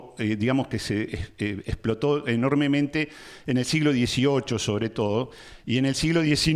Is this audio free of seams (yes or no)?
yes